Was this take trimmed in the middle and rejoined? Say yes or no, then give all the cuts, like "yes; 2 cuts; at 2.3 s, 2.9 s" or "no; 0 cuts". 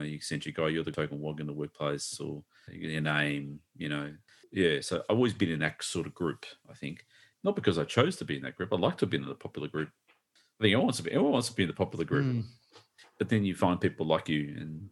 yes; 2 cuts; at 0.9 s, 4.4 s